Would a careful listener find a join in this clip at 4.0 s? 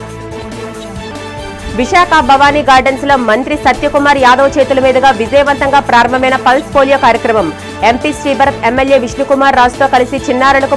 no; 1 cut; at 1.1 s

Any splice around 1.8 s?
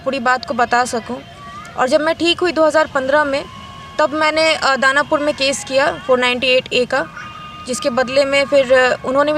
no; 0 cuts

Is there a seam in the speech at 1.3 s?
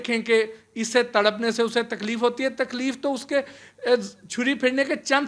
no; 0 cuts

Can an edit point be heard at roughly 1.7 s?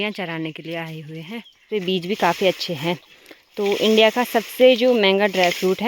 yes; 1 cut; at 1.7 s

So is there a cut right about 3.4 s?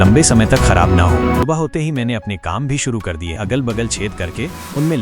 yes; 2 cuts; at 1.5 s, 3.4 s

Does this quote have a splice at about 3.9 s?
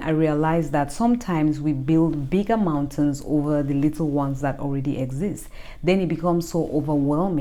no; 0 cuts

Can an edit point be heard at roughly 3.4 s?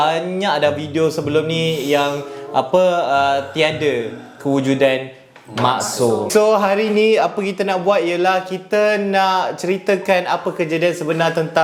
no; 1 cut; at 6.3 s

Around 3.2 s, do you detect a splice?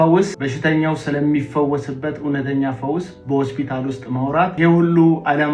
no; 1 cut; at 4.6 s

